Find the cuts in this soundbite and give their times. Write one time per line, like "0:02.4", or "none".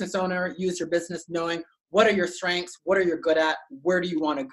none

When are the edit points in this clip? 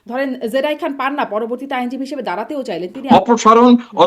0:03.1

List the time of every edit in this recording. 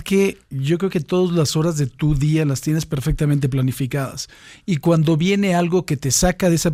none

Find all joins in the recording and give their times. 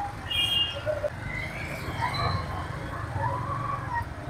0:01.1

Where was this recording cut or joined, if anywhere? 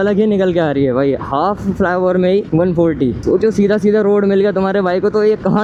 none

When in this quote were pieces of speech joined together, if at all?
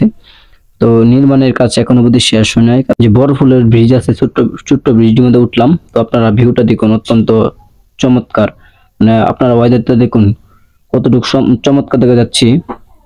0:02.9

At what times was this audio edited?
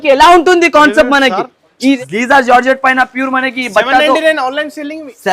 0:02.0

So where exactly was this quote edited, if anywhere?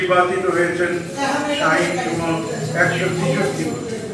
none

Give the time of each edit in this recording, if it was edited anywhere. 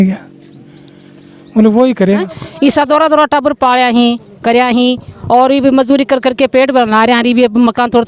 0:02.1

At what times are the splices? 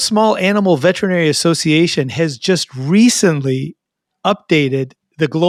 none

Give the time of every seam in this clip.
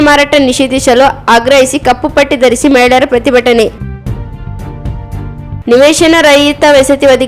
0:03.8
0:05.6

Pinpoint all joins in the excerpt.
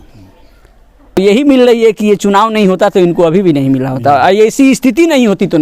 0:01.2

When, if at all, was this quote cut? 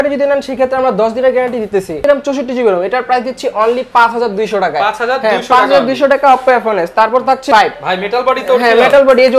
0:02.0
0:07.5

